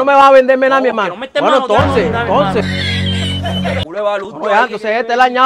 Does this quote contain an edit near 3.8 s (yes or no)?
yes